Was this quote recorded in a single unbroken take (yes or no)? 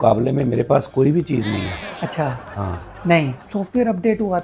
no